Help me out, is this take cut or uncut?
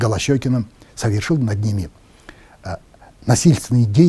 uncut